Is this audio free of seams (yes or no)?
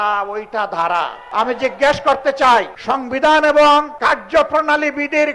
no